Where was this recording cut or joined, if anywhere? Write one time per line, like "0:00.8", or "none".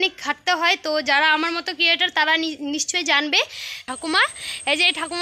0:03.8